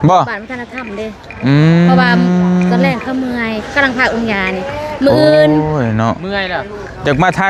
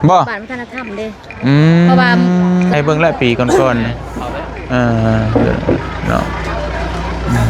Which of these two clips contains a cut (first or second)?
second